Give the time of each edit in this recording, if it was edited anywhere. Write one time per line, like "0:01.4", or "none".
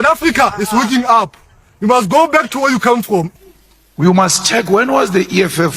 0:03.3